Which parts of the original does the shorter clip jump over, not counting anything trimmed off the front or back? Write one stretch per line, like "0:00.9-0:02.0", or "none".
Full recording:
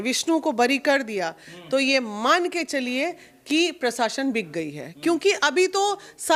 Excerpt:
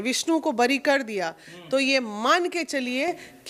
none